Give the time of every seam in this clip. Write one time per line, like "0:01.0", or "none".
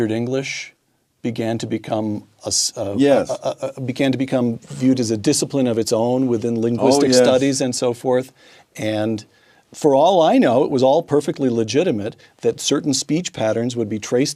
none